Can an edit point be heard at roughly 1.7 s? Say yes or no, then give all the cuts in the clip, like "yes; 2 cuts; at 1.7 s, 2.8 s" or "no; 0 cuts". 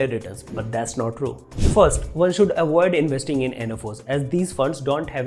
no; 0 cuts